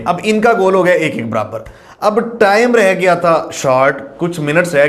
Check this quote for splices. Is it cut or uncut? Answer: uncut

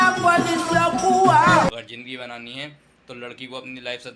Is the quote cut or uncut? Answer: cut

